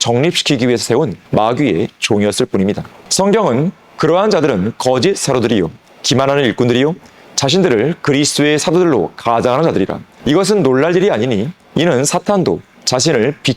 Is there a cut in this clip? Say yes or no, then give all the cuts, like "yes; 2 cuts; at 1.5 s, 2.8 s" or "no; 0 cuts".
yes; 3 cuts; at 1.2 s, 3.0 s, 10.1 s